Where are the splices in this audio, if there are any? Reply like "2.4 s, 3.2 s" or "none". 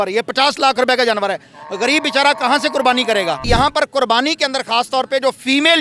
3.4 s